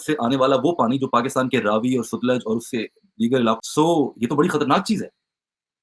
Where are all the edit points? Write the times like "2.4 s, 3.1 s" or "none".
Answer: none